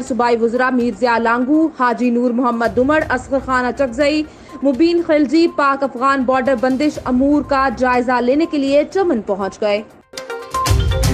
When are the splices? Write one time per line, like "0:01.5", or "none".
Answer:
0:10.0